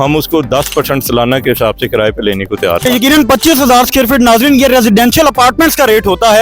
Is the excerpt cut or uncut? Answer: cut